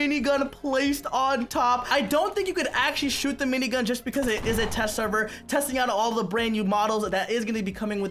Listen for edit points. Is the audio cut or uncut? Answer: uncut